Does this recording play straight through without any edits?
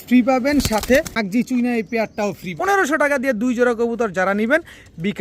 no; 2 cuts; at 1.2 s, 2.5 s

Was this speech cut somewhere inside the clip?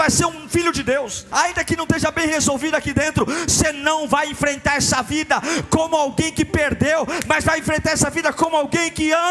yes; 1 cut; at 1.3 s

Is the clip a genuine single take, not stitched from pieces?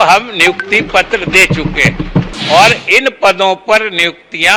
no; 1 cut; at 2.3 s

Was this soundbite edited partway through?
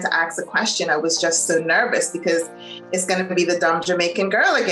no; 0 cuts

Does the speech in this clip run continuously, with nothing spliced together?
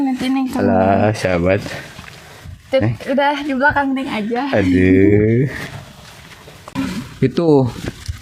no; 1 cut; at 6.7 s

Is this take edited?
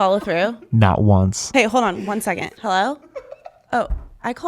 yes; 2 cuts; at 1.4 s, 2.5 s

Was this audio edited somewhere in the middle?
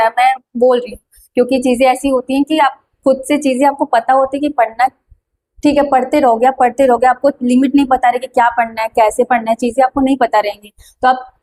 no; 0 cuts

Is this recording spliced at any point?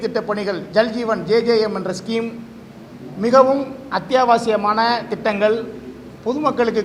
no; 0 cuts

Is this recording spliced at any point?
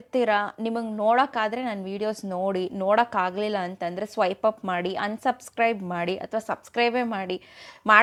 no; 0 cuts

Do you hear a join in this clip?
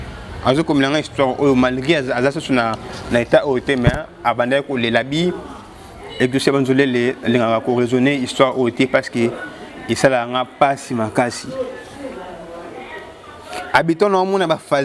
no; 0 cuts

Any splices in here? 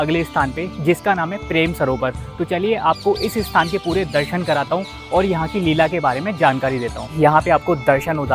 no; 0 cuts

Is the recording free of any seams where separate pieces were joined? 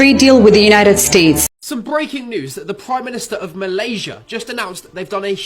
no; 1 cut; at 1.4 s

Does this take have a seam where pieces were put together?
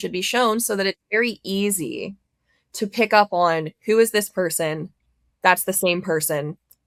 no; 0 cuts

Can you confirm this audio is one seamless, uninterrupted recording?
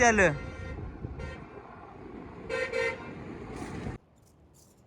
no; 1 cut; at 4.0 s

